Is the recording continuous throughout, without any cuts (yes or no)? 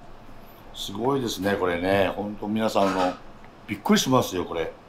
yes